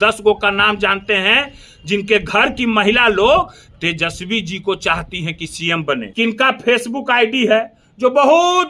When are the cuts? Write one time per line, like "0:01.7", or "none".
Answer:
0:06.1